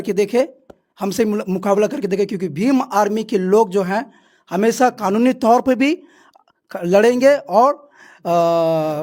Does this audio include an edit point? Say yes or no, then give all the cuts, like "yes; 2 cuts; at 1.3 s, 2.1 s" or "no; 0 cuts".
no; 0 cuts